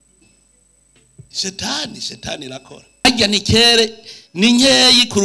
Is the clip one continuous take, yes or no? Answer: no